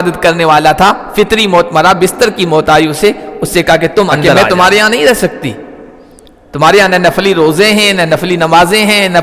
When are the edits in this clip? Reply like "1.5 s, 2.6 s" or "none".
4.5 s